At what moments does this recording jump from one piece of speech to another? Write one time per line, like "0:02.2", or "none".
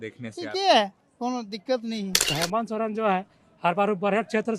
0:02.3